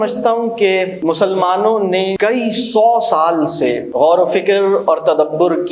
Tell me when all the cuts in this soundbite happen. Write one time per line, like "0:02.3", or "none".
0:00.9
0:02.1
0:03.8